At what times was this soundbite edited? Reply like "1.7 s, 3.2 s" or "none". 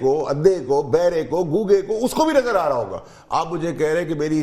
none